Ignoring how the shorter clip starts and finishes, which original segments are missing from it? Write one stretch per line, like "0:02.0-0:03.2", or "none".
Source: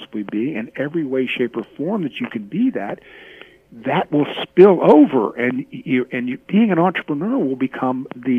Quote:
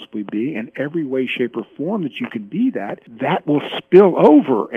0:03.0-0:03.7